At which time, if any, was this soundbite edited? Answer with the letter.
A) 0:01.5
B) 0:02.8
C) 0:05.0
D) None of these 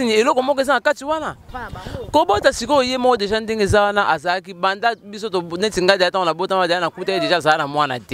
A